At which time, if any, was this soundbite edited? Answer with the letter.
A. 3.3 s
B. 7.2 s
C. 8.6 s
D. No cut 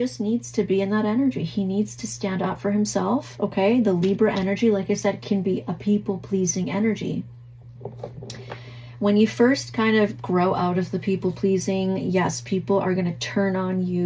D